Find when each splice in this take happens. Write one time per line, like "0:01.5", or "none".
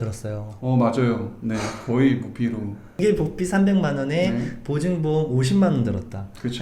0:03.0